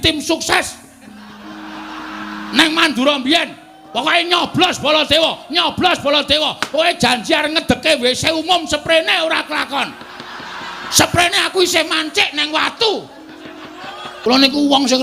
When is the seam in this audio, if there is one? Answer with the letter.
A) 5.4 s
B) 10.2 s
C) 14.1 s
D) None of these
C